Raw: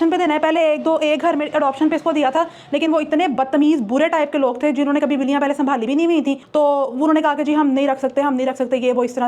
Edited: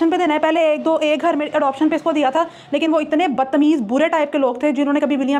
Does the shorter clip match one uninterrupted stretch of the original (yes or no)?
yes